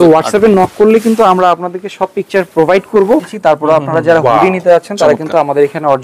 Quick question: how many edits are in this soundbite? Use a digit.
1